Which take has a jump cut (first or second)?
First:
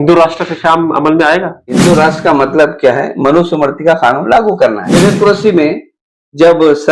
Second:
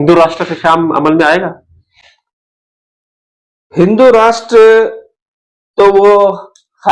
first